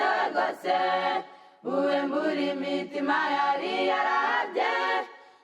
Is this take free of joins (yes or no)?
no